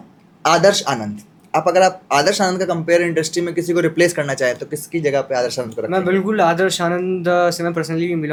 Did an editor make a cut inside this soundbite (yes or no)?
no